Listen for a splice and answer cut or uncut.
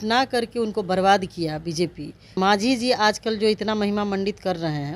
cut